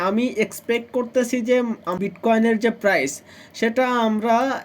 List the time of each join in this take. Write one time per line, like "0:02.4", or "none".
0:01.8